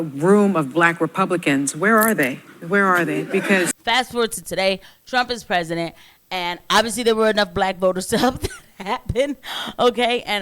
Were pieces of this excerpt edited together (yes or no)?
yes